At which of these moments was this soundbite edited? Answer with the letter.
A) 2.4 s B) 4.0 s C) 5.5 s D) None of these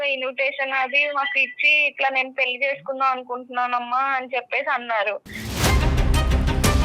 C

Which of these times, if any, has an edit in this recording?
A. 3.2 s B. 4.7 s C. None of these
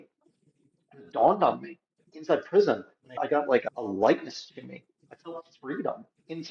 A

